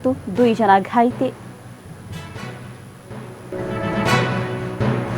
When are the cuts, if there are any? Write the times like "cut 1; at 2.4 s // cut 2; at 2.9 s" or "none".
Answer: cut 1; at 3.5 s